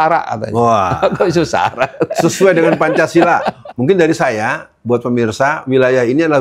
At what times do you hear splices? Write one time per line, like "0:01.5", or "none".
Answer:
0:03.5